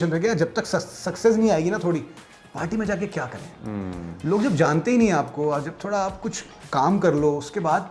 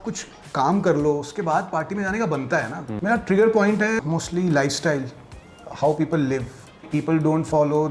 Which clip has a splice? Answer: second; 3 cuts; at 2.9 s, 4.0 s, 6.8 s

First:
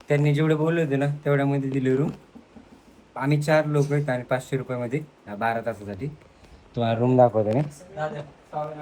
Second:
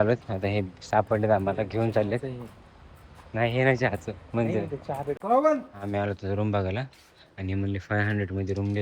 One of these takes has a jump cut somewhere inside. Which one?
second; 1 cut; at 5.1 s

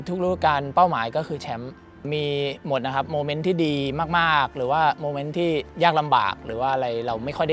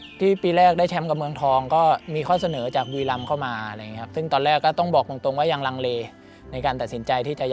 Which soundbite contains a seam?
first; 1 cut; at 2.0 s

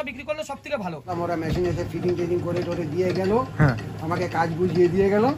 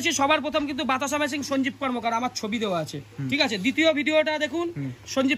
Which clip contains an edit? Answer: first; 1 cut; at 1.1 s

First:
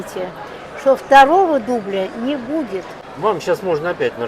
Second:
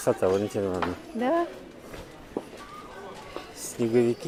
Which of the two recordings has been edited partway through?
first; 1 cut; at 3.0 s

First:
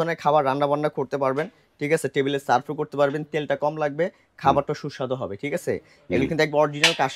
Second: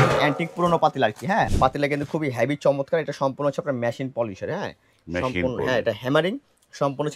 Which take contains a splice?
second; 1 cut; at 1.5 s

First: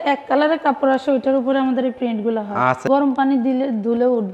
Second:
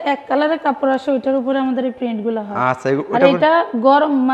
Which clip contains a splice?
first; 1 cut; at 2.8 s

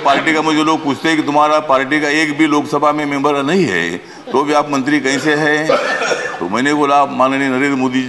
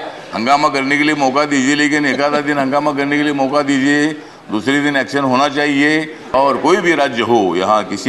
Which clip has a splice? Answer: second; 1 cut; at 6.3 s

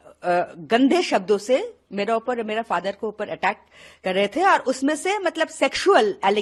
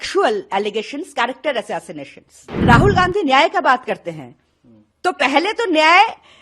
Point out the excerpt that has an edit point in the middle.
second; 1 cut; at 2.5 s

